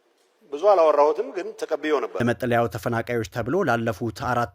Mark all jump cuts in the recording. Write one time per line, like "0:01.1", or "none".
0:02.2